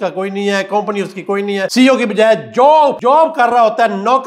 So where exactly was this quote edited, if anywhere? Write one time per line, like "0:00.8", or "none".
0:01.7
0:03.0